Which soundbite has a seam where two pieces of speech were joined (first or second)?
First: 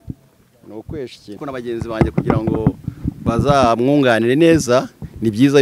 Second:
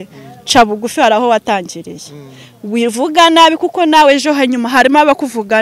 first